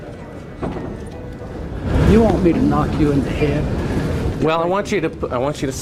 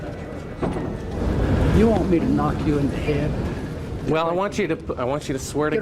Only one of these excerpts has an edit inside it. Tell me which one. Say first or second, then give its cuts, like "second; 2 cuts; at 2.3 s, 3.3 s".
second; 1 cut; at 1.1 s